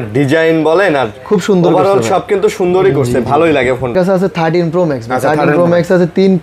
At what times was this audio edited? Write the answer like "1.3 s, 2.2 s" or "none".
3.9 s